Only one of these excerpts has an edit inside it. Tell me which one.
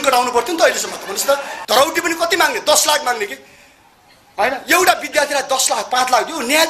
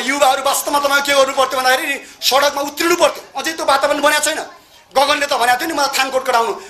first; 1 cut; at 1.5 s

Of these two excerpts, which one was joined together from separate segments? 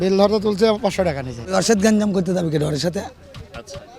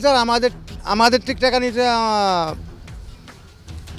first; 1 cut; at 1.3 s

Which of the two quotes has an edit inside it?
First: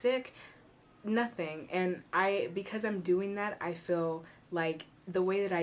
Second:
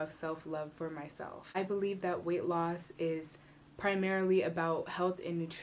second; 1 cut; at 1.6 s

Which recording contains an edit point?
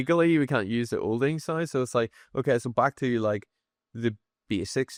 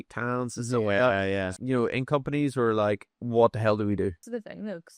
second; 3 cuts; at 1.5 s, 3.1 s, 4.2 s

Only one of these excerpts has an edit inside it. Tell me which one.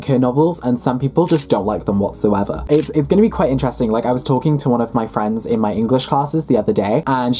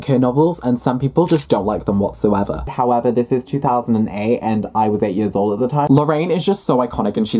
second; 2 cuts; at 2.6 s, 5.9 s

